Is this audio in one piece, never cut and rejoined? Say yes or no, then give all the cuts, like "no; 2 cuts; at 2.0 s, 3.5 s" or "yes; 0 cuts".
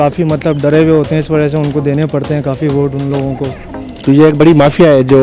no; 1 cut; at 3.7 s